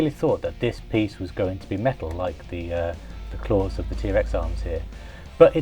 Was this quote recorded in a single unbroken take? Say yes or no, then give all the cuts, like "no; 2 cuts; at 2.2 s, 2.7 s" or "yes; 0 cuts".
yes; 0 cuts